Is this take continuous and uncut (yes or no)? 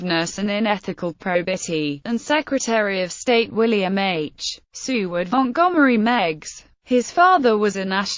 yes